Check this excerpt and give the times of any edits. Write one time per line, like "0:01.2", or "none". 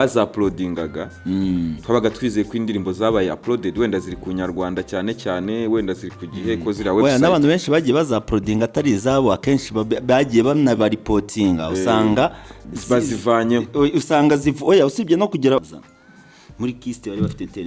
0:15.6

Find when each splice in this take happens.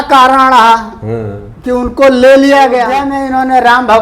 0:03.1

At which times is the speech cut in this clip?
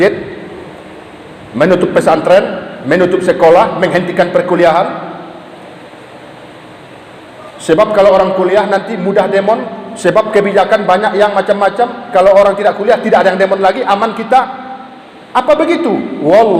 none

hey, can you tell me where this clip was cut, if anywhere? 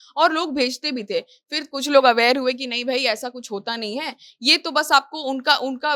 none

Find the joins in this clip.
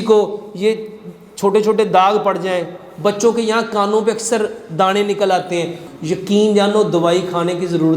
0:05.9

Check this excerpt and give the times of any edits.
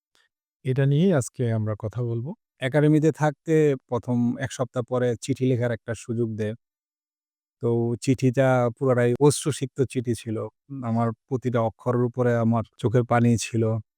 0:02.4
0:09.2
0:12.7

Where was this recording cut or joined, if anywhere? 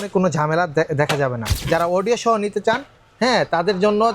0:01.4

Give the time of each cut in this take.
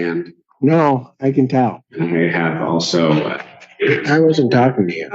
0:01.8

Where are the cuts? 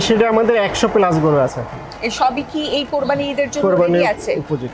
none

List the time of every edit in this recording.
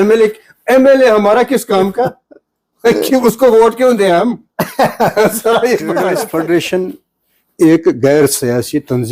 0:06.1

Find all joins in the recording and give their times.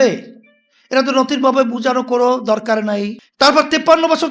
0:03.2

